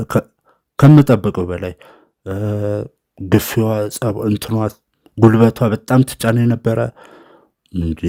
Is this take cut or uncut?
uncut